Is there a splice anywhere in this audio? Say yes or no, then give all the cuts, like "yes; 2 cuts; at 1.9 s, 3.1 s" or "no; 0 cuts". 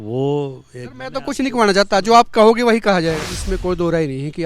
yes; 1 cut; at 3.3 s